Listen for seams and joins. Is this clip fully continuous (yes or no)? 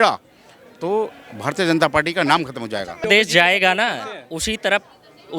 no